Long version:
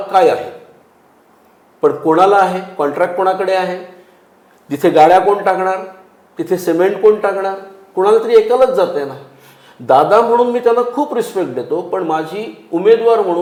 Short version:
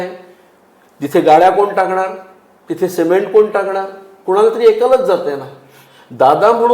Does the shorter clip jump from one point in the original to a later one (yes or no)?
no